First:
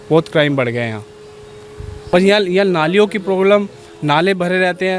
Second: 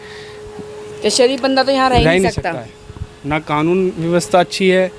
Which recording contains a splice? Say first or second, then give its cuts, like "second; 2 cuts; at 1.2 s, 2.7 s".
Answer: first; 1 cut; at 2.1 s